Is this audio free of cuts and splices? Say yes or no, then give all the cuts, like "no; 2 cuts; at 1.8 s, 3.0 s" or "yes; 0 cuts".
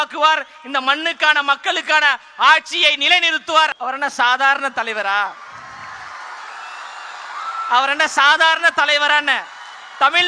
no; 1 cut; at 3.7 s